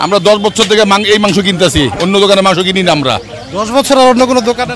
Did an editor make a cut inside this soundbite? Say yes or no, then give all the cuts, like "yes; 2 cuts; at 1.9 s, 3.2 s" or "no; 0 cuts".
no; 0 cuts